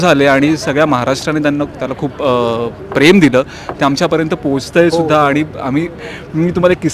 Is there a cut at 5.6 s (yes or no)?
no